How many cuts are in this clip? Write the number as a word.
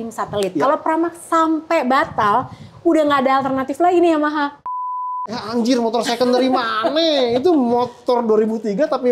one